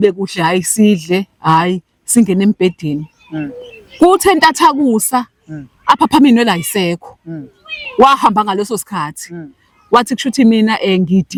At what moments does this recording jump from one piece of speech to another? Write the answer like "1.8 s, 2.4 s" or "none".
none

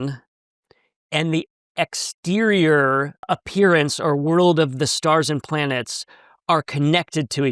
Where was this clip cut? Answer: 3.2 s

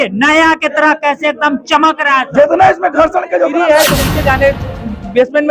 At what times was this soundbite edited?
3.6 s

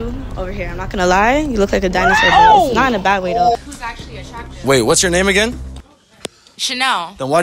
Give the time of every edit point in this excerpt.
3.6 s

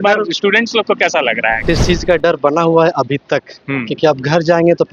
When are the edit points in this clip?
1.6 s

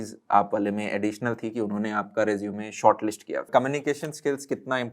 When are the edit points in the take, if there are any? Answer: 3.5 s

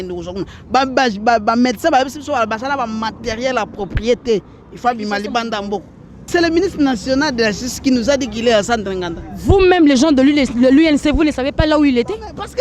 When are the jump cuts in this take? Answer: 6.3 s

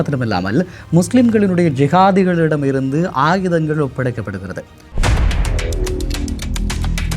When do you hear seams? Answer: 4.8 s

